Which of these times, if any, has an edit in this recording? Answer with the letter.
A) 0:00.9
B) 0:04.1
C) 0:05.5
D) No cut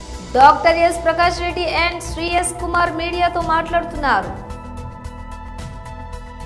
C